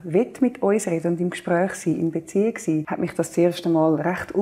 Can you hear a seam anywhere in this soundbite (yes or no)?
yes